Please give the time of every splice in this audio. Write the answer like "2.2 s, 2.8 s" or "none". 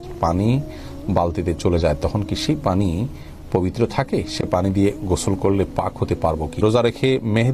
6.6 s